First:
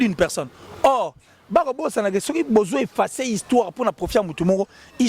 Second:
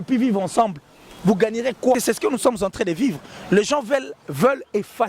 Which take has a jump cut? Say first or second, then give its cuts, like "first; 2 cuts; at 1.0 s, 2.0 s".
second; 1 cut; at 2.0 s